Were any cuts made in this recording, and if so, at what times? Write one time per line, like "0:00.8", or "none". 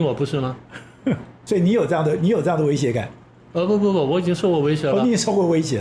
0:01.3